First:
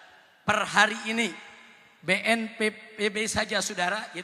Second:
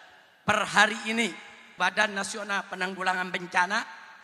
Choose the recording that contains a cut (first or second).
second